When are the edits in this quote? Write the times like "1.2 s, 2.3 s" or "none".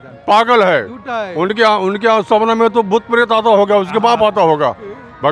none